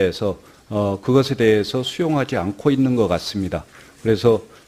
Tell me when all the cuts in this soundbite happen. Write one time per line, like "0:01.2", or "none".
0:00.9